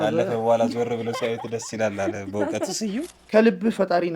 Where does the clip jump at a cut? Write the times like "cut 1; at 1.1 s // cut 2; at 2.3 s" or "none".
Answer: cut 1; at 3.2 s